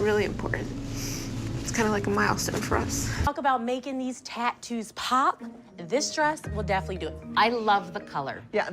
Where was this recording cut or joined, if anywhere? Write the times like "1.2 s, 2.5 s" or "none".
3.2 s